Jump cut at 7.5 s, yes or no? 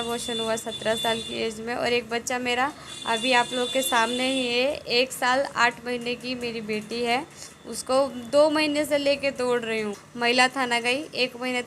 no